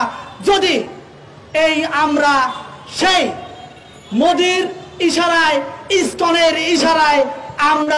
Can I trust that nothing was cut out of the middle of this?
yes; 0 cuts

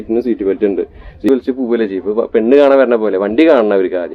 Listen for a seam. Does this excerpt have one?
yes; 1 cut; at 1.3 s

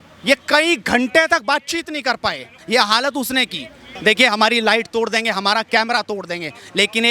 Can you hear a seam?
yes; 2 cuts; at 2.5 s, 3.9 s

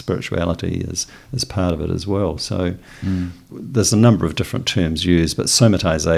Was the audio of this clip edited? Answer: yes; 1 cut; at 3.4 s

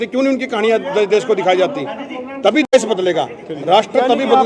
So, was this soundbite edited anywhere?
no; 0 cuts

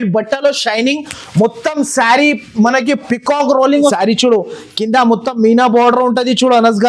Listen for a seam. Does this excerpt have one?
yes; 1 cut; at 3.9 s

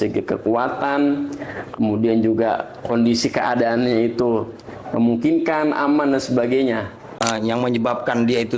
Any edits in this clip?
yes; 1 cut; at 7.1 s

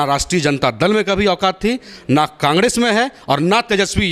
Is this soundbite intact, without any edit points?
yes; 0 cuts

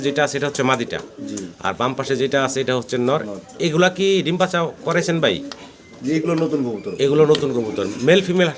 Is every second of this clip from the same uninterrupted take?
yes; 0 cuts

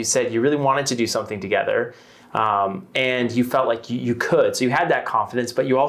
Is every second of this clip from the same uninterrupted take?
yes; 0 cuts

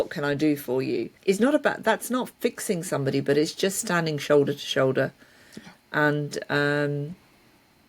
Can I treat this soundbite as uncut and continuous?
no; 1 cut; at 1.1 s

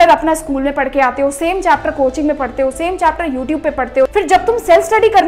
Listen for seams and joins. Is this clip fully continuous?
no; 1 cut; at 4.1 s

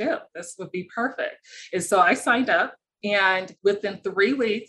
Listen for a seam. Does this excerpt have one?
yes; 1 cut; at 3.5 s

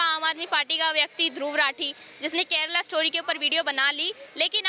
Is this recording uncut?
yes; 0 cuts

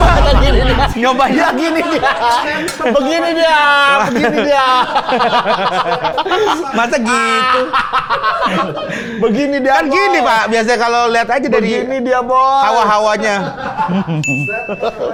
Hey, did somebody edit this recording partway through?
no; 0 cuts

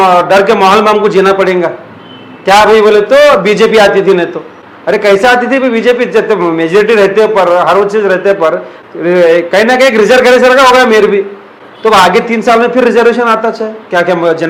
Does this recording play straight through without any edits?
yes; 0 cuts

